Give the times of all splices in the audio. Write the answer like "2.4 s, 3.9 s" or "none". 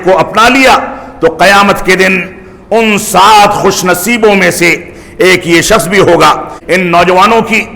6.5 s